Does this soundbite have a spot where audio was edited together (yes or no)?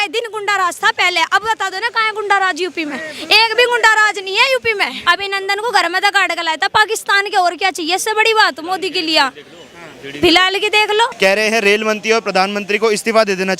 yes